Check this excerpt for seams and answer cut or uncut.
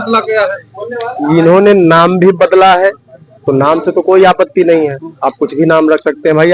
uncut